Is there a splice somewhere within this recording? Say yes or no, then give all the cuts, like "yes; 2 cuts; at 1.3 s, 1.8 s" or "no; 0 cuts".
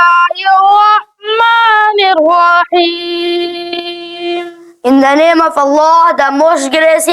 no; 0 cuts